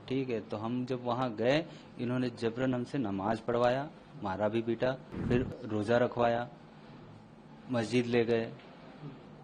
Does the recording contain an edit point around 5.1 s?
yes; 1 cut; at 5.1 s

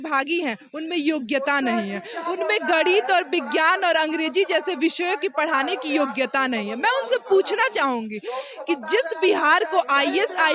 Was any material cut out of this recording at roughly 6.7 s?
no; 0 cuts

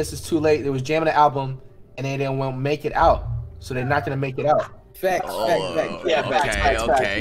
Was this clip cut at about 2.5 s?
no; 0 cuts

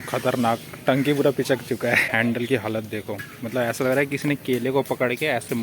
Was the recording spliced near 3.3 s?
no; 1 cut; at 2.1 s

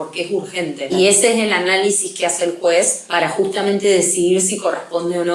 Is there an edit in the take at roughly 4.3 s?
no; 2 cuts; at 0.9 s, 3.0 s

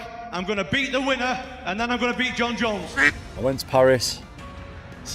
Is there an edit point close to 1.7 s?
no; 1 cut; at 3.2 s

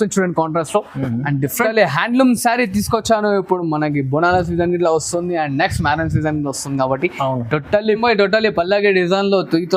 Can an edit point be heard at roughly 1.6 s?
yes; 2 cuts; at 1.6 s, 8.0 s

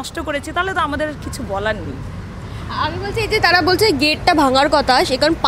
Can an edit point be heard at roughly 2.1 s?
no; 0 cuts

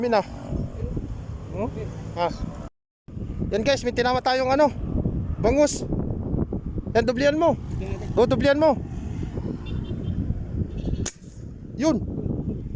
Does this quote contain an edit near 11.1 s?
no; 1 cut; at 2.8 s

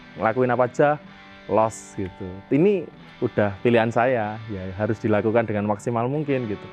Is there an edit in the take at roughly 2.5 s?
yes; 1 cut; at 2.5 s

